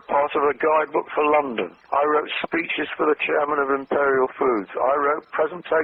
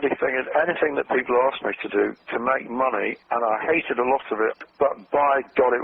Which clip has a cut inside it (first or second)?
second